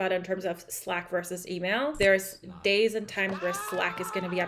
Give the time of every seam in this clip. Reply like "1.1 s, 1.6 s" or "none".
1.9 s